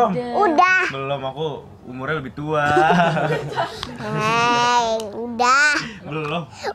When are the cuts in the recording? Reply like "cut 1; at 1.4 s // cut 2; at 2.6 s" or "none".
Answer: none